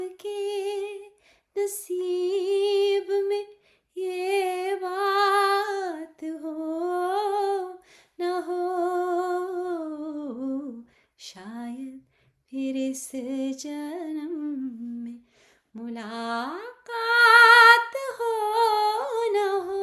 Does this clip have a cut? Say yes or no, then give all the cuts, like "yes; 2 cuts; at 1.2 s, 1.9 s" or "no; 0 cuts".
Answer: no; 0 cuts